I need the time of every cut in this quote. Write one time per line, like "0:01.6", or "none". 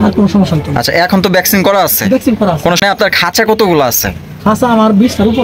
0:02.8

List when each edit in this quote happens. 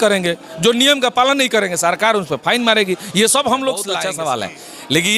0:04.0

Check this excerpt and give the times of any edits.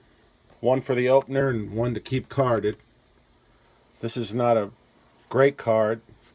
0:01.5

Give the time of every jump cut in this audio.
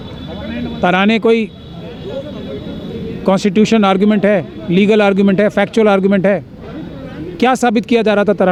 none

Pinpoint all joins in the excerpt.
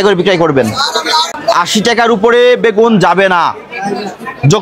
0:01.3

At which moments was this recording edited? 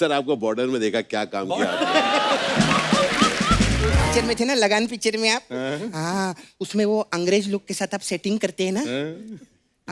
0:04.1

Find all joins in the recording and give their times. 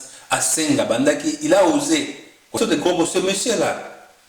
0:02.5

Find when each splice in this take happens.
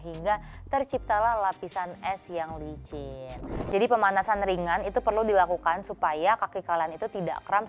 0:03.5

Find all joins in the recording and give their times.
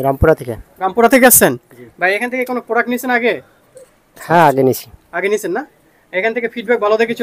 none

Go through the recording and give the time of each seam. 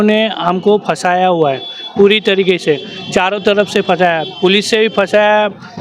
none

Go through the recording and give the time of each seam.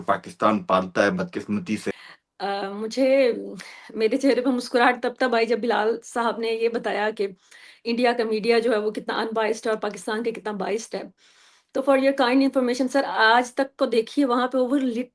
0:01.9

